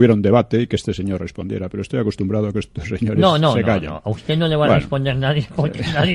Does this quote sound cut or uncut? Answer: cut